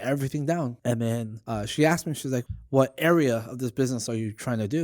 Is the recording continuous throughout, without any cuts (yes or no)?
no